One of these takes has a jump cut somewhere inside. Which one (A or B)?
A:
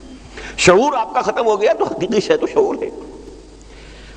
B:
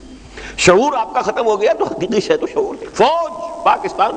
B